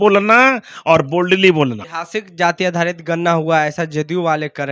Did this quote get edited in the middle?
yes; 1 cut; at 1.9 s

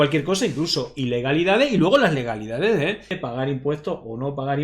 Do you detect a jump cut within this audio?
yes; 1 cut; at 3.2 s

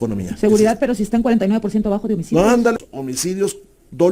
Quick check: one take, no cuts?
no; 1 cut; at 2.8 s

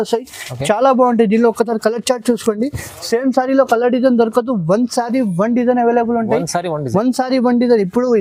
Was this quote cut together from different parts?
no; 0 cuts

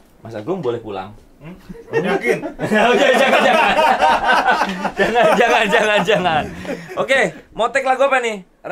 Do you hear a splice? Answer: no; 0 cuts

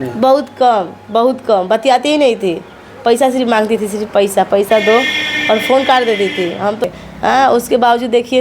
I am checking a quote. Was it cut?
yes; 1 cut; at 6.8 s

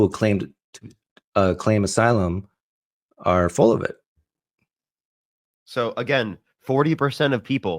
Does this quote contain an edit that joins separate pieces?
no; 0 cuts

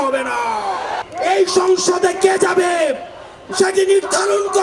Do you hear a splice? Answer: yes; 1 cut; at 1.0 s

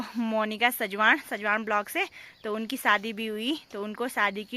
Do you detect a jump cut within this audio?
no; 0 cuts

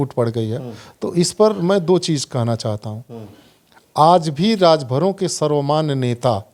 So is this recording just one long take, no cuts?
yes; 0 cuts

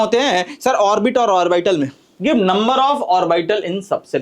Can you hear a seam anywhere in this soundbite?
yes; 1 cut; at 2.0 s

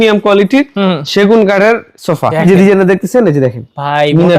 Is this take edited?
yes; 1 cut; at 2.3 s

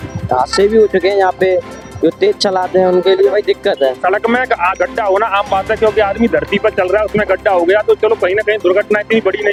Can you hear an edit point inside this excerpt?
no; 0 cuts

